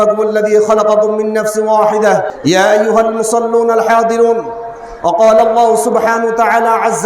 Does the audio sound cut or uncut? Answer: cut